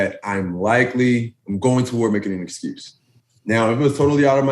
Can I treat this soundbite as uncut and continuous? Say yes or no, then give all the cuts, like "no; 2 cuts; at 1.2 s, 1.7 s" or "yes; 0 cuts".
no; 2 cuts; at 1.4 s, 2.9 s